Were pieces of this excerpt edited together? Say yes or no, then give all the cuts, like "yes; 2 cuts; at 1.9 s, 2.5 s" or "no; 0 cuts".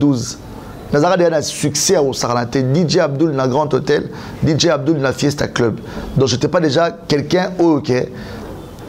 no; 0 cuts